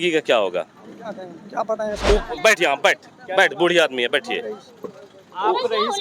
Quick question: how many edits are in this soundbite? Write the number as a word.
one